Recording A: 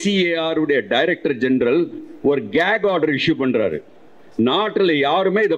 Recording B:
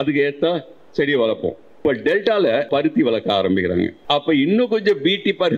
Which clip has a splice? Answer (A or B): B